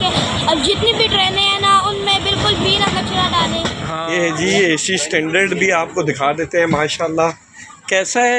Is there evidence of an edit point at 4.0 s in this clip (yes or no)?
yes